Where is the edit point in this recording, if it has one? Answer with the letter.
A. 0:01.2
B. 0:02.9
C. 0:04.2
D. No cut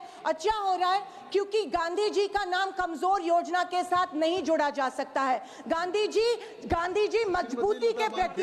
D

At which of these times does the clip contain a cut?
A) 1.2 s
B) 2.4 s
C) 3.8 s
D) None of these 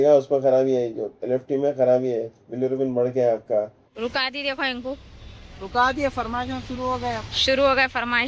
C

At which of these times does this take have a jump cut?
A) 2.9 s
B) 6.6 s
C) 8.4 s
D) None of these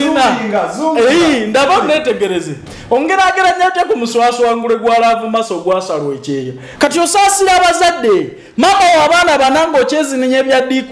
B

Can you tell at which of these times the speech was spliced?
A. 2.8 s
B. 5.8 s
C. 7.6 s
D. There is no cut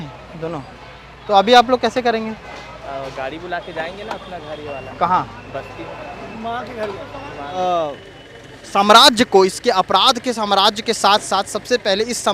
C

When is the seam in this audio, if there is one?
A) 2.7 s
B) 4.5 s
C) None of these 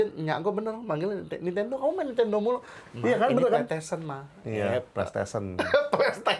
C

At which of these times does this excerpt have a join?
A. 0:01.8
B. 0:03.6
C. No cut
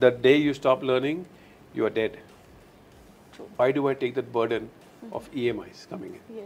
B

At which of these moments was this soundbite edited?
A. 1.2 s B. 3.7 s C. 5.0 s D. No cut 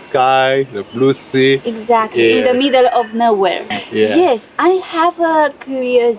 B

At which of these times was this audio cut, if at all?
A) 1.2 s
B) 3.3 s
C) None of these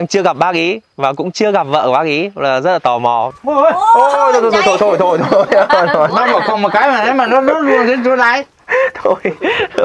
B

